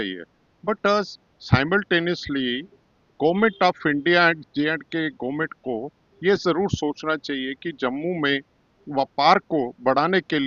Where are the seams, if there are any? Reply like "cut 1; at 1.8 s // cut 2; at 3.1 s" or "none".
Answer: none